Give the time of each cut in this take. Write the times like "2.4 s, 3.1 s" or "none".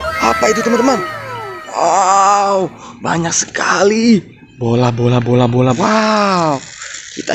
5.8 s